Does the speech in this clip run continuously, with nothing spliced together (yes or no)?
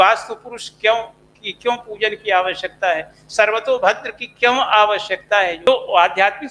no